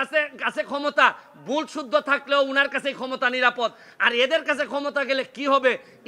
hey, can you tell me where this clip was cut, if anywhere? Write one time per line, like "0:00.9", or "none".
none